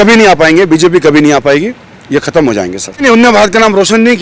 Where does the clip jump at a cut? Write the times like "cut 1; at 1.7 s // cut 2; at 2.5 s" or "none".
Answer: cut 1; at 3.0 s